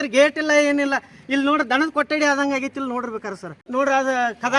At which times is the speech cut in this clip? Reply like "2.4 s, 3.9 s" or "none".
3.5 s

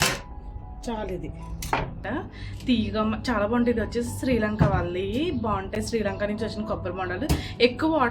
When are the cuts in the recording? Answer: 2.0 s

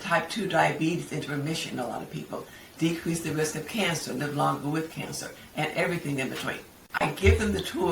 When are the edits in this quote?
7.0 s

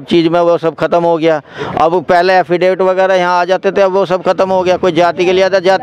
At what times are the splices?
none

